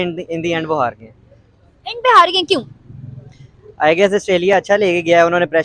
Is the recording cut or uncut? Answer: uncut